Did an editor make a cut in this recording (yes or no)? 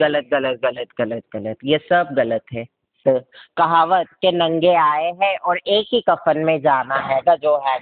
yes